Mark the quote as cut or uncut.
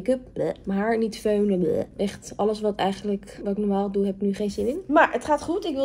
uncut